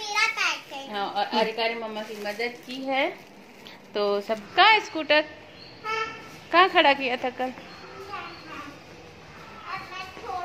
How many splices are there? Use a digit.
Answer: 1